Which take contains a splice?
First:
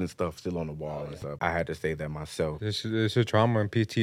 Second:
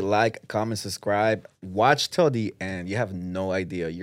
first; 2 cuts; at 0.8 s, 2.6 s

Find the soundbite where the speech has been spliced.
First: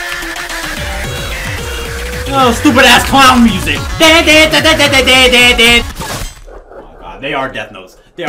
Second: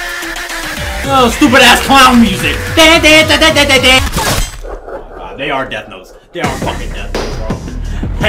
second; 2 cuts; at 1.1 s, 4.0 s

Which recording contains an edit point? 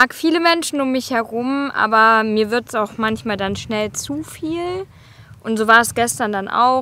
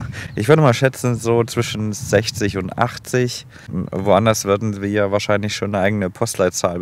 second; 1 cut; at 3.8 s

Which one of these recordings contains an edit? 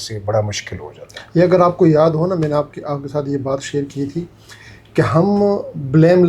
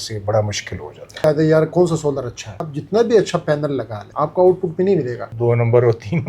second; 4 cuts; at 1.2 s, 2.7 s, 4.0 s, 5.2 s

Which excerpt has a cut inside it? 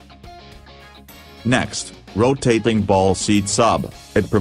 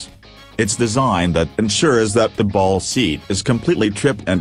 first; 1 cut; at 0.9 s

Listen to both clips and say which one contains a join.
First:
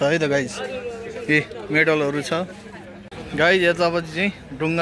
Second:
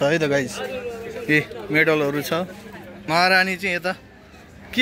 second; 1 cut; at 2.9 s

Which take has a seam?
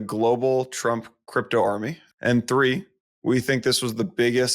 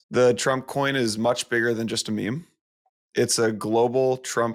first; 1 cut; at 2.0 s

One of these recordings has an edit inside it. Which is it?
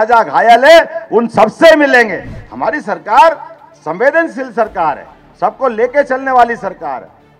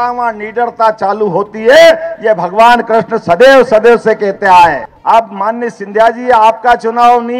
second; 1 cut; at 4.9 s

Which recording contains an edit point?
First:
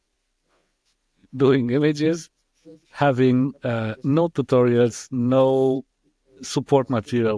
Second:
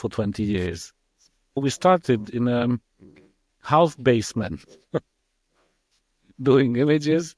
second; 1 cut; at 1.6 s

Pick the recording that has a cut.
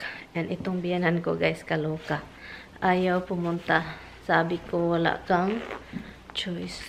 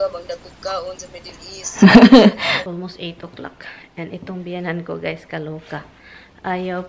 second; 1 cut; at 2.6 s

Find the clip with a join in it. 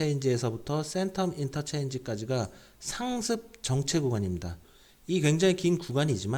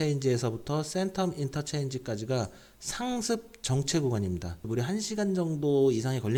first; 1 cut; at 4.6 s

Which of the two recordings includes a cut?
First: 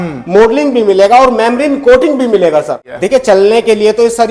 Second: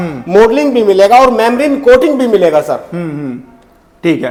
first; 1 cut; at 2.9 s

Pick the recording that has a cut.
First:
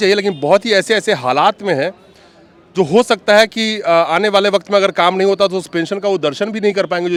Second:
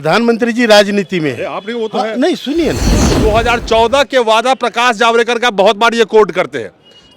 second; 1 cut; at 3.1 s

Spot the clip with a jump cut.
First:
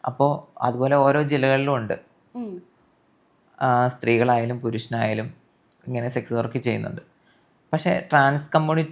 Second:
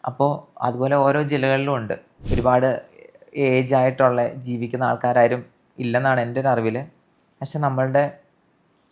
second; 1 cut; at 2.1 s

